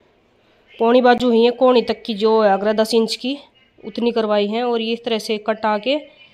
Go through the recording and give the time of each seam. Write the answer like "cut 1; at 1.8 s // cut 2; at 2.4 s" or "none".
none